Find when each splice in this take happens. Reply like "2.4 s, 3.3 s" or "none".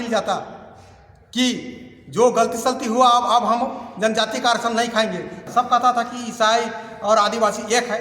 5.5 s